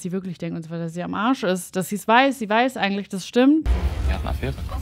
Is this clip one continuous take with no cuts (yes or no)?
no